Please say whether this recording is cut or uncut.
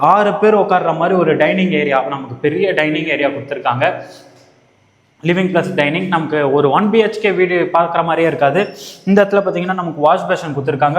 uncut